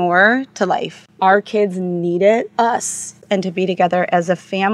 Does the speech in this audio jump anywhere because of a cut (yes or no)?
yes